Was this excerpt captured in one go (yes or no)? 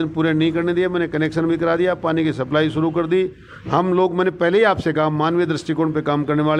yes